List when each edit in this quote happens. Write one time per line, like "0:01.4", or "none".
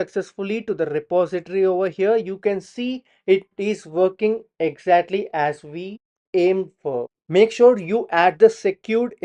0:07.2